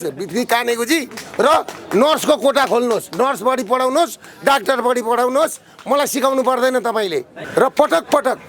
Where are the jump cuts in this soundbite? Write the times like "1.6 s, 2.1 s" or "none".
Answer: 7.4 s